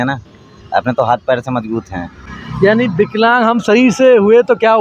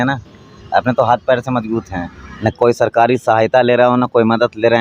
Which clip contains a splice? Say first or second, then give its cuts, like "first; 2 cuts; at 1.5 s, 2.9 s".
second; 1 cut; at 2.4 s